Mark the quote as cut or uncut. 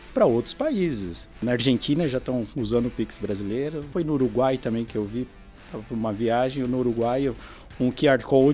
cut